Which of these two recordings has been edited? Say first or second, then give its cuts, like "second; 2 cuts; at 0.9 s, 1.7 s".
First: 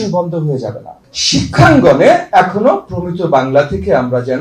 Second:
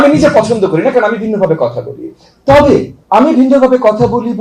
first; 1 cut; at 0.9 s